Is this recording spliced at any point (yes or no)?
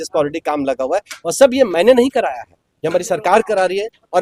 no